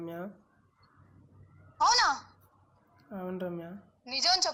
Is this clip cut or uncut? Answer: uncut